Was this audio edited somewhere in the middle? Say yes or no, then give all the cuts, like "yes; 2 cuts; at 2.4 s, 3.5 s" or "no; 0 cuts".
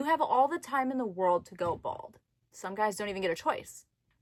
no; 0 cuts